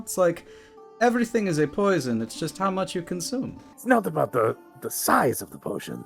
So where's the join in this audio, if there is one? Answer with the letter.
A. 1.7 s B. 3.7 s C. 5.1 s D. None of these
B